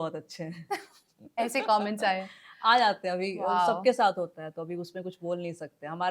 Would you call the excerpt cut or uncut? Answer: uncut